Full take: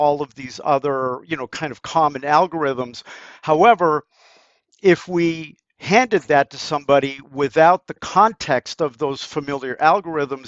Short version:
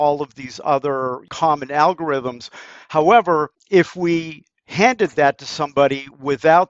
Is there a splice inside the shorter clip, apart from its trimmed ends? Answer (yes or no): yes